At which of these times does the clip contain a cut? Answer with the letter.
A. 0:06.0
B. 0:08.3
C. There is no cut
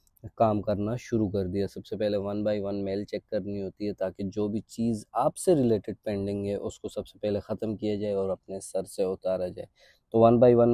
C